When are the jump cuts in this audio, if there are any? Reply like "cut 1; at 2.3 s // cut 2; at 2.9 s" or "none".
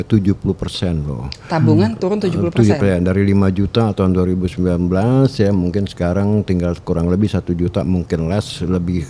none